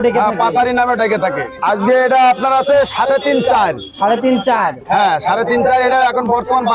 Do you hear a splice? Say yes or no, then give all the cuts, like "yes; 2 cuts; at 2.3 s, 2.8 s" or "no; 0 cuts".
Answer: yes; 1 cut; at 1.5 s